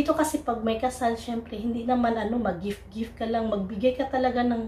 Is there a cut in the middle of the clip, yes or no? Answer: no